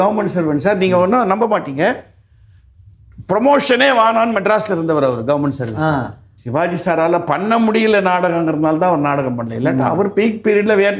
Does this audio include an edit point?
yes; 1 cut; at 6.3 s

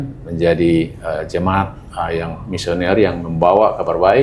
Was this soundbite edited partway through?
no; 0 cuts

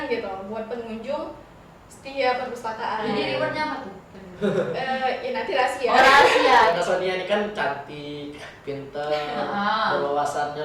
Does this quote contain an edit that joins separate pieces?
yes; 1 cut; at 6.7 s

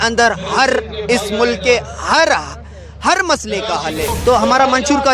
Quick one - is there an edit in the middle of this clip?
yes; 1 cut; at 4.1 s

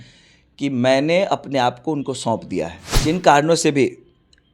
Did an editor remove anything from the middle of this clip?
yes; 1 cut; at 2.9 s

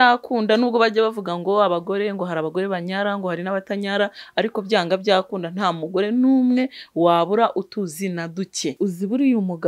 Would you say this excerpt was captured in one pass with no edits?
no; 1 cut; at 8.7 s

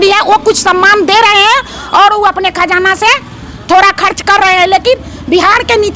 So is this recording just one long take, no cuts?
yes; 0 cuts

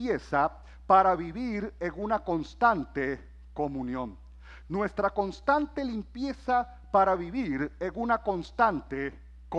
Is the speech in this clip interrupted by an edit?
no; 0 cuts

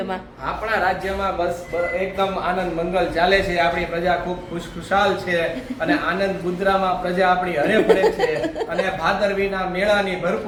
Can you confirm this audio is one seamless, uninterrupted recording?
yes; 0 cuts

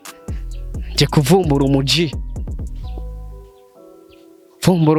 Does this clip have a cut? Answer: no; 0 cuts

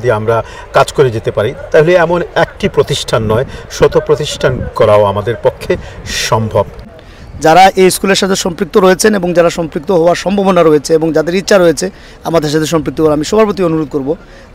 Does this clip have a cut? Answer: yes; 1 cut; at 6.8 s

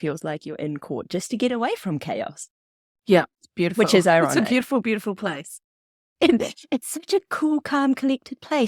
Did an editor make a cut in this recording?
no; 0 cuts

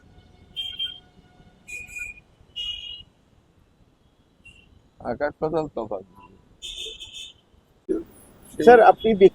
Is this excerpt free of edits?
no; 1 cut; at 7.9 s

